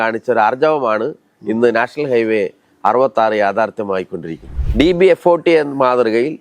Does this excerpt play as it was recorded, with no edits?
no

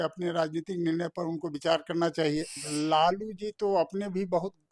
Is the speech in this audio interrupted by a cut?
yes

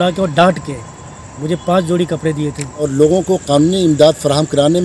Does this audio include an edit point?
yes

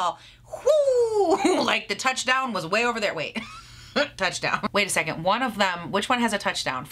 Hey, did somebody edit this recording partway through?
yes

